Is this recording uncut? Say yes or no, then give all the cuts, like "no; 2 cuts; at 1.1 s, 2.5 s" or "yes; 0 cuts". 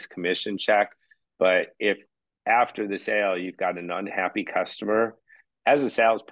yes; 0 cuts